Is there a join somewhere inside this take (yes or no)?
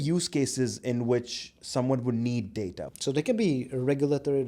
yes